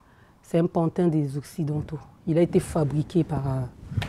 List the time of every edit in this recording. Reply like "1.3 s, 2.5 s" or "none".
none